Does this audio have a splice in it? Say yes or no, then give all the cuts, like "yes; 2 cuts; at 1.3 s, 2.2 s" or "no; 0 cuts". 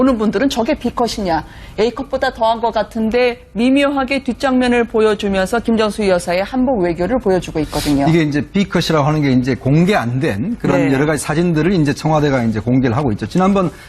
yes; 1 cut; at 4.4 s